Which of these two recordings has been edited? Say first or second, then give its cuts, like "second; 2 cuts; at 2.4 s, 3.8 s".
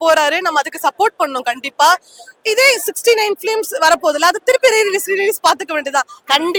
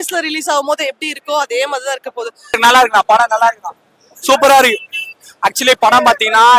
second; 1 cut; at 2.6 s